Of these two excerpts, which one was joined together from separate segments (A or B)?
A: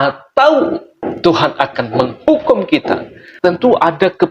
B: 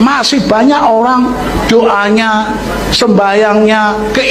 A